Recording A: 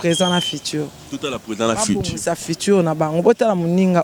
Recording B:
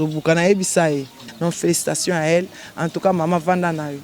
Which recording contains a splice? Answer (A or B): B